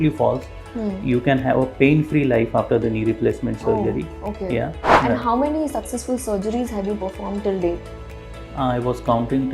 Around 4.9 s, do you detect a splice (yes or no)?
yes